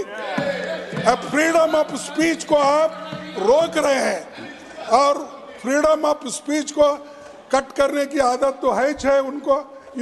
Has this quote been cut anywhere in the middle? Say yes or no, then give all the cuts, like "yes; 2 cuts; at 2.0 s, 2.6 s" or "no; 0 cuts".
no; 0 cuts